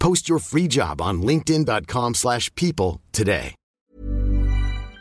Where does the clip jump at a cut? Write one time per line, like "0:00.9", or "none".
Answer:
0:03.9